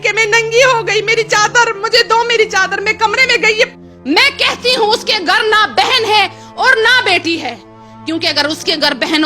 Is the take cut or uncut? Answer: cut